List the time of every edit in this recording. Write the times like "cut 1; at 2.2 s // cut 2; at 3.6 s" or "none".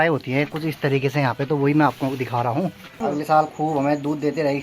cut 1; at 3.0 s